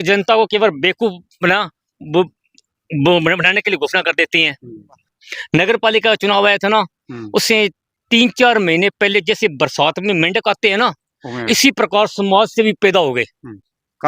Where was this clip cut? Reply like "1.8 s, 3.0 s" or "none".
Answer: 5.0 s